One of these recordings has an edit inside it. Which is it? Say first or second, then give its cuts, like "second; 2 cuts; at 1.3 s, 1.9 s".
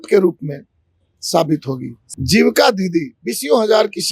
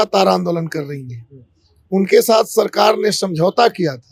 first; 1 cut; at 2.0 s